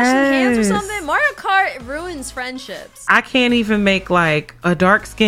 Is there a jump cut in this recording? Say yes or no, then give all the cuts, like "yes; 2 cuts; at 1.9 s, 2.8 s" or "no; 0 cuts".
yes; 1 cut; at 3.0 s